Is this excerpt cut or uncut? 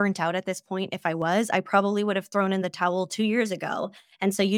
uncut